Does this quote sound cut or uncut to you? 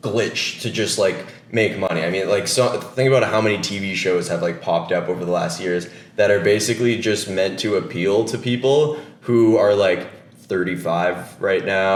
uncut